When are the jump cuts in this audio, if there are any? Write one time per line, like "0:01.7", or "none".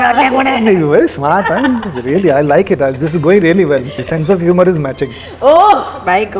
0:04.0